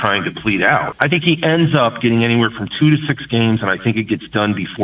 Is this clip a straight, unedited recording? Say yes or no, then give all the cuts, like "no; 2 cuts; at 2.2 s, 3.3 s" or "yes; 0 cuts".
no; 1 cut; at 0.9 s